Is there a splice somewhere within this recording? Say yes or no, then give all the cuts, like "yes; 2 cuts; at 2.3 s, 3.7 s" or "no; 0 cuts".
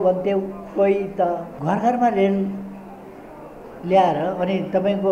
yes; 1 cut; at 1.5 s